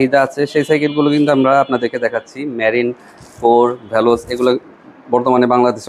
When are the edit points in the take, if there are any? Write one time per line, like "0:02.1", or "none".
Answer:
none